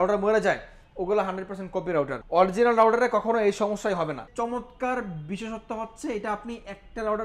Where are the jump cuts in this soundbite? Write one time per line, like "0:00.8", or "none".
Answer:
0:02.2
0:04.3